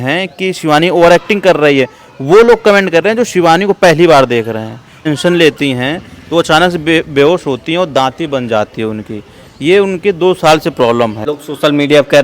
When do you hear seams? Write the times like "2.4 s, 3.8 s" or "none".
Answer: 5.1 s, 11.3 s